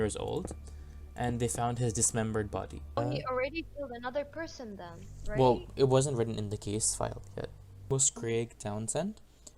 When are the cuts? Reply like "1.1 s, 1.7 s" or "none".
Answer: 3.0 s, 7.9 s